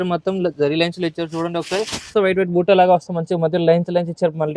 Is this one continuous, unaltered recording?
no; 1 cut; at 2.1 s

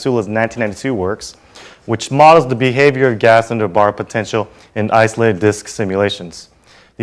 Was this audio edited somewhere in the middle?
no; 0 cuts

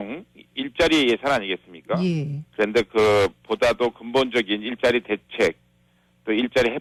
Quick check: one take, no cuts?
yes; 0 cuts

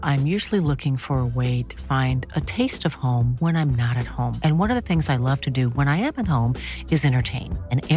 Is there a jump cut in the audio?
no; 0 cuts

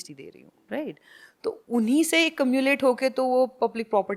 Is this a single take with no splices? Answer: yes; 0 cuts

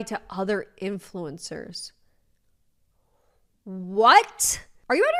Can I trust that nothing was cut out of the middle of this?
yes; 0 cuts

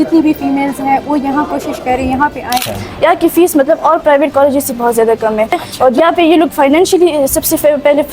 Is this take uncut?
no; 2 cuts; at 2.9 s, 6.0 s

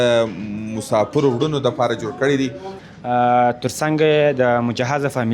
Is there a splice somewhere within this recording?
yes; 1 cut; at 2.7 s

